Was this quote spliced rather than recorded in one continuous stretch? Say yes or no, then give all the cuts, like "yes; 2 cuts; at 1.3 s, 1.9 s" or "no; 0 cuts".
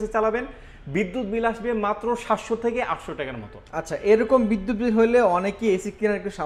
no; 0 cuts